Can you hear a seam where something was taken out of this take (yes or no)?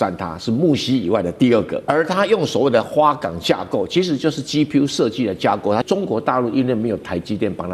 yes